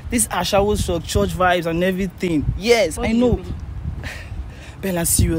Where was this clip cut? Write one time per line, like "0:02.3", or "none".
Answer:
none